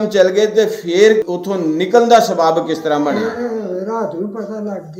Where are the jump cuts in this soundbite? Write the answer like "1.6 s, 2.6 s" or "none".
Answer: 1.3 s